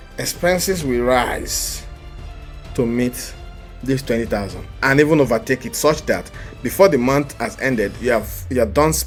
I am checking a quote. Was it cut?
no; 0 cuts

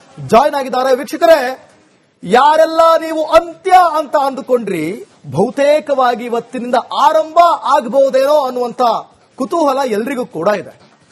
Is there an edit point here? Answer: no; 0 cuts

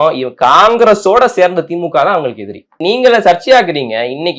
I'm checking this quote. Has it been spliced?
yes; 1 cut; at 2.8 s

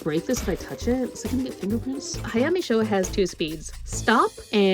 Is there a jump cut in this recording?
yes; 1 cut; at 2.1 s

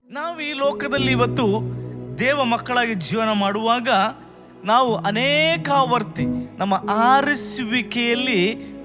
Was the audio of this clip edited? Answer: yes; 1 cut; at 6.5 s

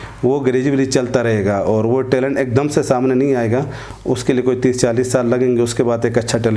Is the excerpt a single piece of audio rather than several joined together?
yes; 0 cuts

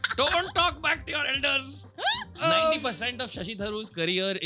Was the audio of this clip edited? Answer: yes; 1 cut; at 2.4 s

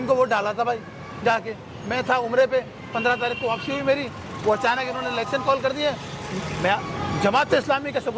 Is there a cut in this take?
no; 0 cuts

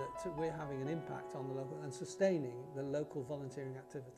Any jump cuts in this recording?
no; 0 cuts

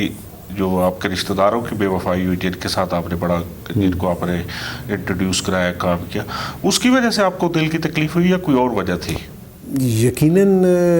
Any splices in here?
no; 0 cuts

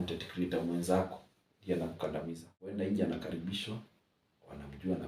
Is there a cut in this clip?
yes; 1 cut; at 2.7 s

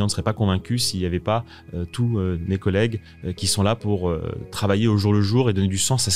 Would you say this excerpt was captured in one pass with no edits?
yes; 0 cuts

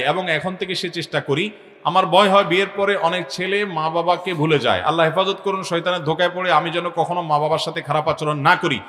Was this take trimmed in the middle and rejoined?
no; 0 cuts

